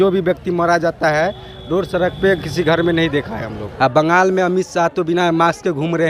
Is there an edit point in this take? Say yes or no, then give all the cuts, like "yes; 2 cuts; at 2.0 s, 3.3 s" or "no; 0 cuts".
no; 0 cuts